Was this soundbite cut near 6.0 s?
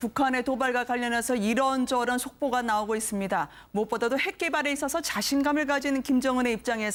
no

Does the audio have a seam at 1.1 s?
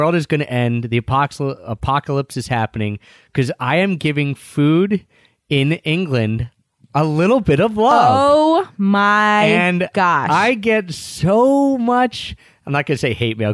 no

